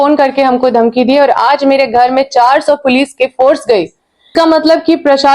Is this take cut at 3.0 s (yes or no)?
no